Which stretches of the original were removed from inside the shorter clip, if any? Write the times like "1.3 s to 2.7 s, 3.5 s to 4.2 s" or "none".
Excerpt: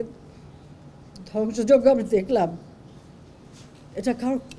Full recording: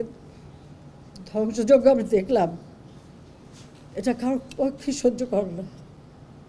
none